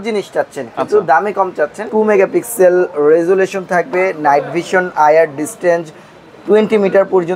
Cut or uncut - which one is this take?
cut